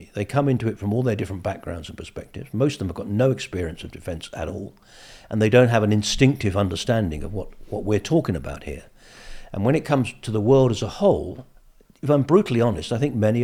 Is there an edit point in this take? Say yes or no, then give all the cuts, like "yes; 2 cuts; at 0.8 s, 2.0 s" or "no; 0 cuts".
no; 0 cuts